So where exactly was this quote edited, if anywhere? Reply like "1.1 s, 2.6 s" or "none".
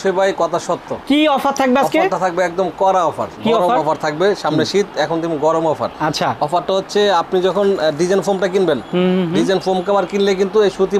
none